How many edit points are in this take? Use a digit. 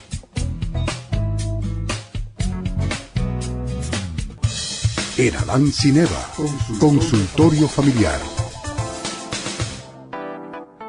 1